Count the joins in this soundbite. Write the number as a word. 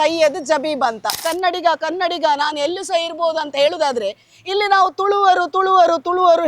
one